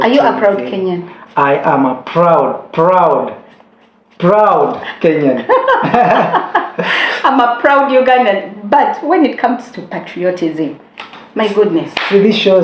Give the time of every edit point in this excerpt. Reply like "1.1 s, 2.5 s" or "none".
7.1 s